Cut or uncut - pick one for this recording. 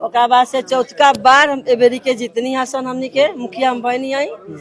uncut